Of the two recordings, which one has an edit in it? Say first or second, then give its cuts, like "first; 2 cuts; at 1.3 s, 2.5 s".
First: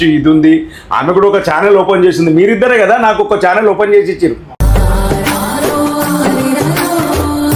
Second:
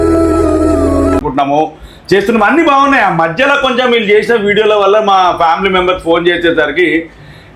second; 1 cut; at 1.3 s